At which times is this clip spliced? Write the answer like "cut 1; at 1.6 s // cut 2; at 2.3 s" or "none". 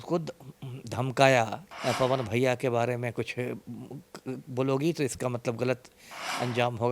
cut 1; at 1.6 s